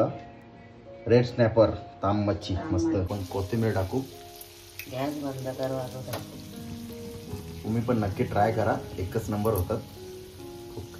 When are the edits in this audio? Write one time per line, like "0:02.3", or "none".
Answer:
0:03.1